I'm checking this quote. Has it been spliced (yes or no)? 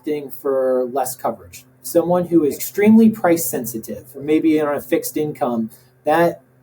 yes